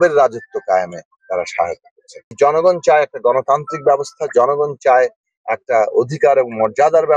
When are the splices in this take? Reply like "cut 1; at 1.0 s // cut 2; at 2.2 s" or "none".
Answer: cut 1; at 2.3 s